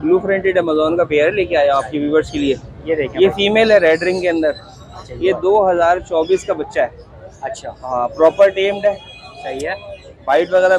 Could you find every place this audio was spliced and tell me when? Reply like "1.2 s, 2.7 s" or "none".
none